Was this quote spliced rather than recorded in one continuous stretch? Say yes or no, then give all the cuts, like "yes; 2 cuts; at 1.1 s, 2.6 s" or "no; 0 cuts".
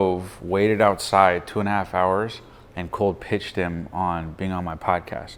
no; 0 cuts